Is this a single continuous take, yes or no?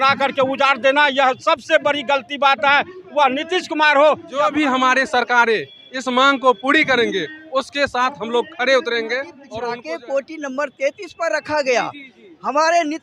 no